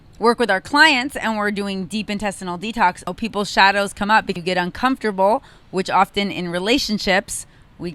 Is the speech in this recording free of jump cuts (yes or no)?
no